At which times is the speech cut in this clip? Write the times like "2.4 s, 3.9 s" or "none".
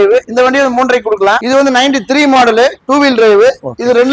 1.4 s